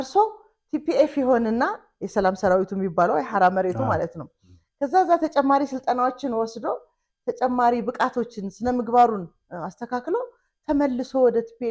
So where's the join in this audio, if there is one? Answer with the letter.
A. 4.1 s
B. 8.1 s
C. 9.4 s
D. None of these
D